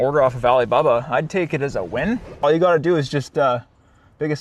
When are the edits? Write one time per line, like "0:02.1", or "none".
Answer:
0:02.4